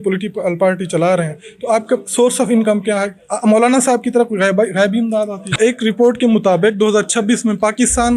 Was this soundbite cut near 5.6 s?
yes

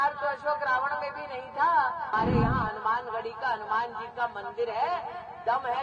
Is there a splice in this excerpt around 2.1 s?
yes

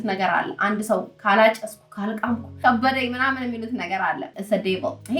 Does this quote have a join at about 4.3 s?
yes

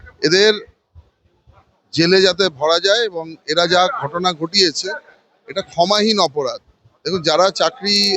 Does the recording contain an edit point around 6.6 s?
no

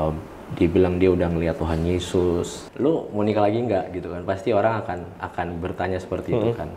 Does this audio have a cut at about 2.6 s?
yes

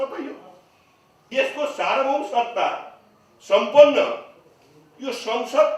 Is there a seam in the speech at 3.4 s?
no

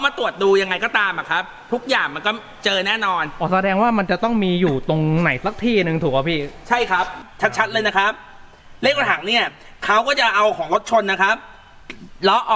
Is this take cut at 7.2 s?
yes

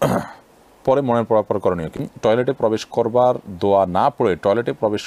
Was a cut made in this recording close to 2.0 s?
yes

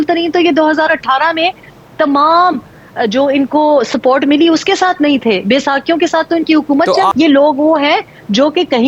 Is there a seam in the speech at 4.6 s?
no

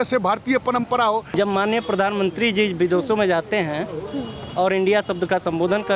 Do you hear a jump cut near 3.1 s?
no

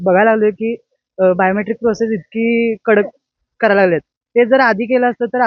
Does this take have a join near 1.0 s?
no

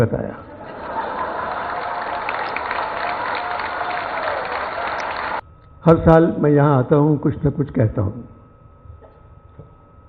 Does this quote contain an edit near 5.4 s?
yes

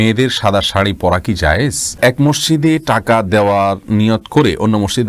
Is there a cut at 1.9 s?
yes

